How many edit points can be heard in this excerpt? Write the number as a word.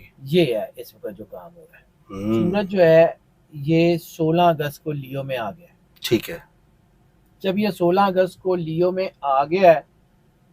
one